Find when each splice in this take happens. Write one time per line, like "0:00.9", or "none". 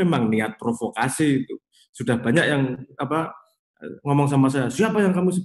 none